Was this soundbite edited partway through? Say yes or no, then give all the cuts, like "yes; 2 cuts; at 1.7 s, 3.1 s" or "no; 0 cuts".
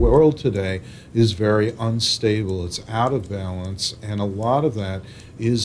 no; 0 cuts